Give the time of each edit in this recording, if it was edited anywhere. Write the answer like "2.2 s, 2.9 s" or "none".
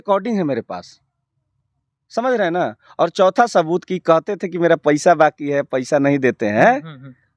none